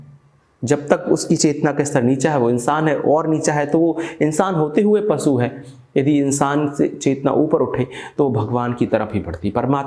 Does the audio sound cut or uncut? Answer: uncut